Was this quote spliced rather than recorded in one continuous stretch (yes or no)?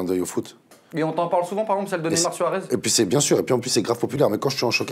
no